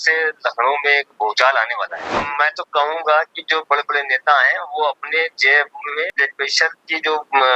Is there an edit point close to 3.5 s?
no; 2 cuts; at 2.1 s, 6.1 s

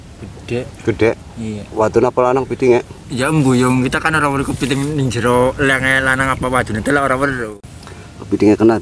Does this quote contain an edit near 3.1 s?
no; 1 cut; at 7.5 s

